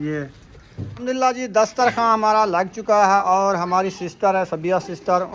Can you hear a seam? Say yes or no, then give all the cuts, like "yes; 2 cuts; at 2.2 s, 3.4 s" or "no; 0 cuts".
yes; 2 cuts; at 0.9 s, 3.2 s